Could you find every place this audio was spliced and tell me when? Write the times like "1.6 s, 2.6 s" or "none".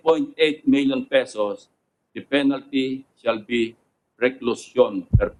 none